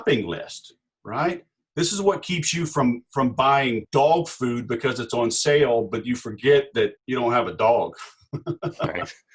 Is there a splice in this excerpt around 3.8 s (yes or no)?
yes